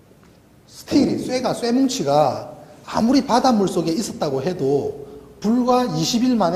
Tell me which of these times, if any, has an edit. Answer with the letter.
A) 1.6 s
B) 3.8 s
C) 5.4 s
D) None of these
D